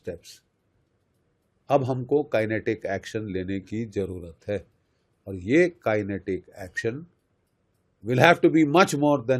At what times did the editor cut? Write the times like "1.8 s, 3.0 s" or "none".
none